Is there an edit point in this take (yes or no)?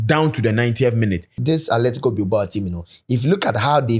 yes